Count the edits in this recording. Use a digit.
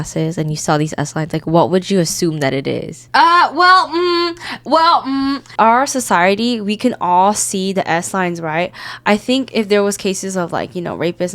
2